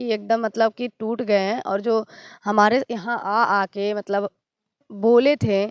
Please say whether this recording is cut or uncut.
uncut